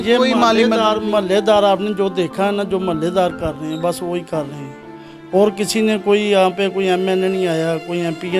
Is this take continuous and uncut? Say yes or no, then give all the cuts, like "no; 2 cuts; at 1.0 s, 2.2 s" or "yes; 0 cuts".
yes; 0 cuts